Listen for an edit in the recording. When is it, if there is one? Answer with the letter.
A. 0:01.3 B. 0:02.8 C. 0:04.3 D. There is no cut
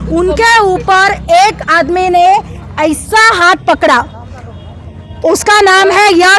D